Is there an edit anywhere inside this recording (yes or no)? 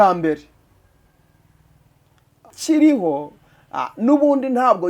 yes